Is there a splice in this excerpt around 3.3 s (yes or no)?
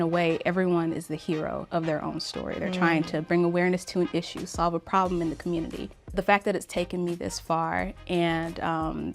no